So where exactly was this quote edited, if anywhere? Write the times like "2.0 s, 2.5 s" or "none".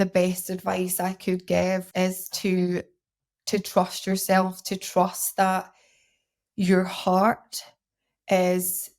1.9 s